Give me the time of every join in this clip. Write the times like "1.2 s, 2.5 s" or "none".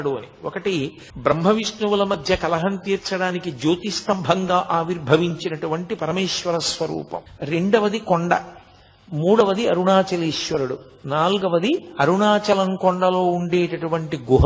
1.0 s, 7.3 s